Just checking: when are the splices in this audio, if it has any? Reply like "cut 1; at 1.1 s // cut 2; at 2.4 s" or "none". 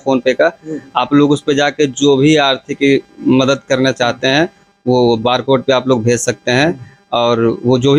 none